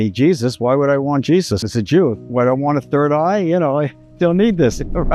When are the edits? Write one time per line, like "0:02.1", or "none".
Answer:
0:01.7
0:04.0

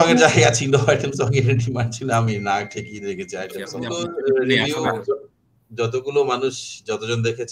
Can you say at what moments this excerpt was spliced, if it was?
0:03.8

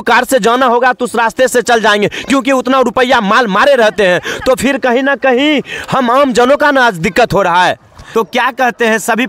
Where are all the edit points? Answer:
0:07.9

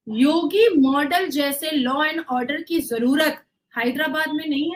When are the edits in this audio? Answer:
none

